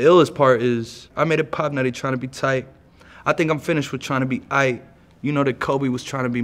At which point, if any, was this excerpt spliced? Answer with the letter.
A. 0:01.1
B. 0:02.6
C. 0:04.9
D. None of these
A